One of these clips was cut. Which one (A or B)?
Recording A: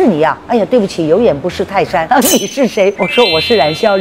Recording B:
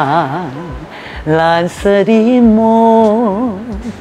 A